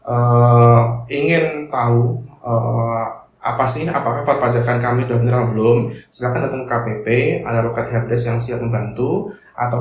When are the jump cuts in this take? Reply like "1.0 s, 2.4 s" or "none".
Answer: none